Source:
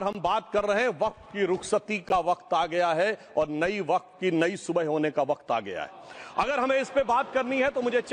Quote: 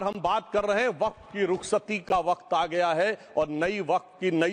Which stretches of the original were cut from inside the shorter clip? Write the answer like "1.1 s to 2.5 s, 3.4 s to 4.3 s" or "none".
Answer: none